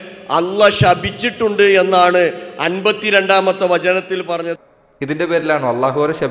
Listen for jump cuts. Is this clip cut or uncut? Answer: cut